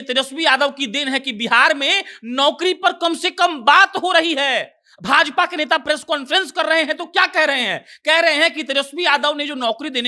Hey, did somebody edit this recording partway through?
no; 0 cuts

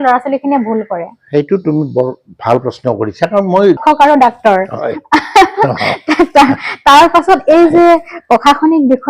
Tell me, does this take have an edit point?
yes; 1 cut; at 3.8 s

